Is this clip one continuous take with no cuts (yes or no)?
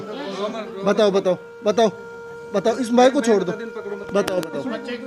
yes